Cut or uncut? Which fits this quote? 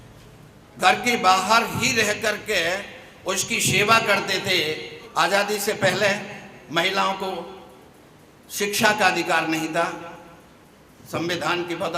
cut